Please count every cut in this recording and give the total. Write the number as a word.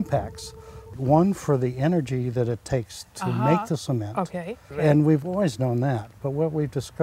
two